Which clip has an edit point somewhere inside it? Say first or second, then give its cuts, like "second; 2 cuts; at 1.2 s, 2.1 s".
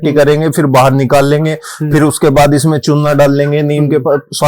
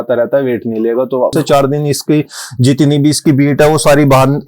second; 1 cut; at 1.3 s